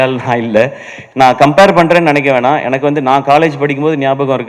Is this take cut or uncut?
cut